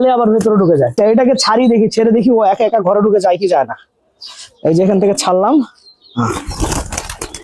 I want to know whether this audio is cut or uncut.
uncut